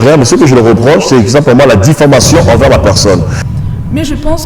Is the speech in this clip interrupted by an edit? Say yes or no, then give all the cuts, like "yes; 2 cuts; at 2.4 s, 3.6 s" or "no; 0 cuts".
yes; 1 cut; at 3.4 s